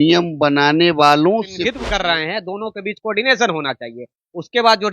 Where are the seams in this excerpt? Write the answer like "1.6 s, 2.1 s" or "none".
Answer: 1.5 s